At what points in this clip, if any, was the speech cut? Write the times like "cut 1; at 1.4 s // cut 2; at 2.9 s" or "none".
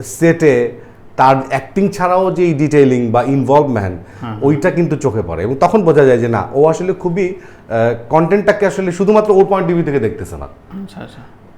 none